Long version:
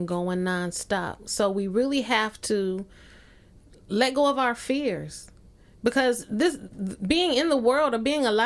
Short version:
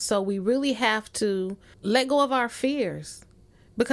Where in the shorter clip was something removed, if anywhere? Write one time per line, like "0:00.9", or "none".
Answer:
0:01.7